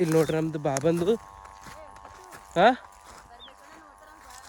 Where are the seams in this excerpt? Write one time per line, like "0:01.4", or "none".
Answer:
none